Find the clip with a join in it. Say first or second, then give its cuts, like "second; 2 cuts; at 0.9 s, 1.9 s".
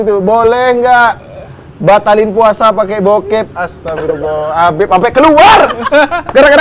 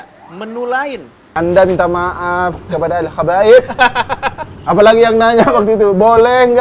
second; 1 cut; at 1.3 s